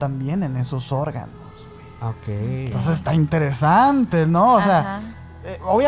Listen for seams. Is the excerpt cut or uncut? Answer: uncut